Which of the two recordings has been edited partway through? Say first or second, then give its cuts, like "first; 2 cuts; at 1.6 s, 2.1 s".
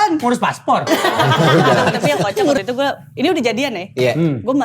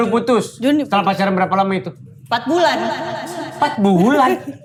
first; 1 cut; at 2.6 s